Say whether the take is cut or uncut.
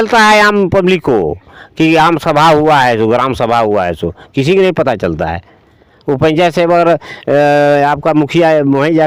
uncut